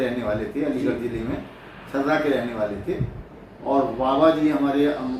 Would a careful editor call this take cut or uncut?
uncut